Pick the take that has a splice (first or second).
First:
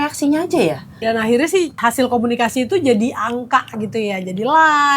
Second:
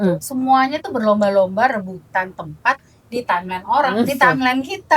first